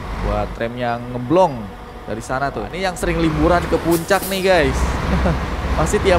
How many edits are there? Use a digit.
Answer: 1